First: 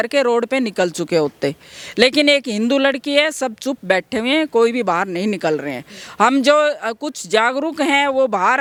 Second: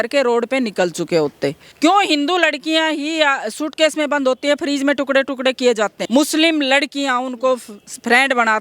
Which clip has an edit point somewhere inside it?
second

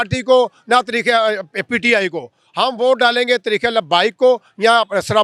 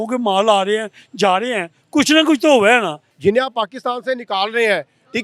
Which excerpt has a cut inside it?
second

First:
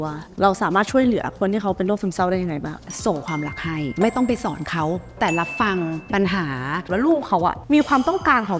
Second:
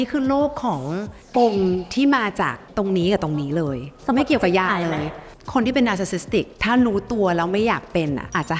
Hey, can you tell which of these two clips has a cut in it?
first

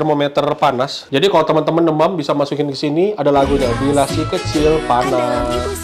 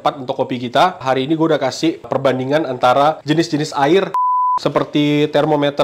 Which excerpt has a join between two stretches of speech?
second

